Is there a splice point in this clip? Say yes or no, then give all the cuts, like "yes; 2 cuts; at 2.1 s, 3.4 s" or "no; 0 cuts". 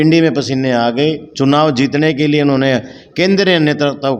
no; 0 cuts